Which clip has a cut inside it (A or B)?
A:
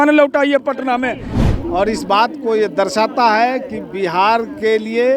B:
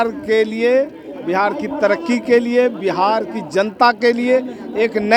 A